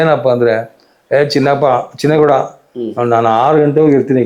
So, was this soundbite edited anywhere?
no; 0 cuts

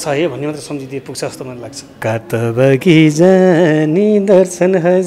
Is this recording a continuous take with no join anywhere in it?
no; 1 cut; at 1.9 s

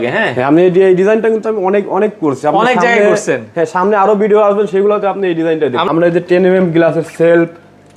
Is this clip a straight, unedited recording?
no; 1 cut; at 5.8 s

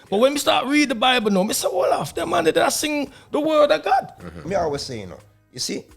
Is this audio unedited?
no; 1 cut; at 4.4 s

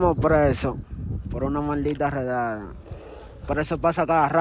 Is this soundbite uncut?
yes; 0 cuts

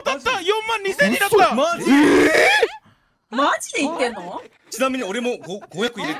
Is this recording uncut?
yes; 0 cuts

